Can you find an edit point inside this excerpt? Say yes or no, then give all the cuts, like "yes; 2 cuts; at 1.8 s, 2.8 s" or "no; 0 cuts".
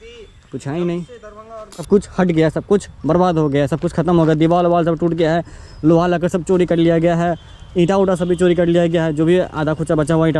yes; 1 cut; at 1.8 s